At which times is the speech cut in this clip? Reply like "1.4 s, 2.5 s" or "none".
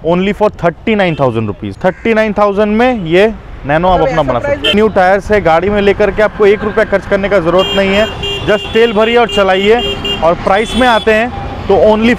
1.6 s, 4.7 s